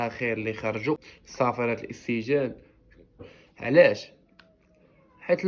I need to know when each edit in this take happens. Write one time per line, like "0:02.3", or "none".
0:01.2
0:03.2